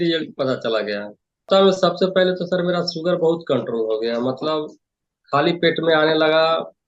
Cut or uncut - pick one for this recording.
cut